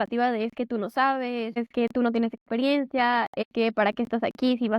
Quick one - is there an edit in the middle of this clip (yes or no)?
yes